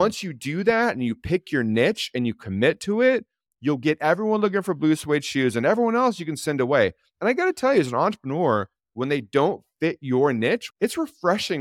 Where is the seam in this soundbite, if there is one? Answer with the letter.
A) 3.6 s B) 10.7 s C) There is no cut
B